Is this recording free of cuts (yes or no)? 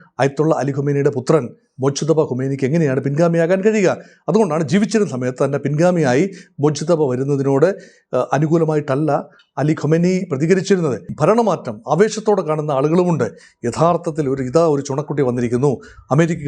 no